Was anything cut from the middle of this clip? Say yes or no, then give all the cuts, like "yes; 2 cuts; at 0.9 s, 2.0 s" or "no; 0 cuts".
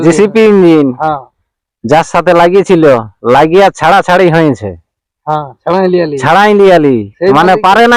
no; 0 cuts